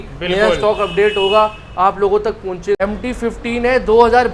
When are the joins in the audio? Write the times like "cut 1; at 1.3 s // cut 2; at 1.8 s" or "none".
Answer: cut 1; at 2.8 s